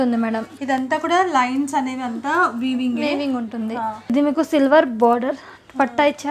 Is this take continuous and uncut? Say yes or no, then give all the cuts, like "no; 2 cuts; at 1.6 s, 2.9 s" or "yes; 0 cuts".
no; 1 cut; at 4.1 s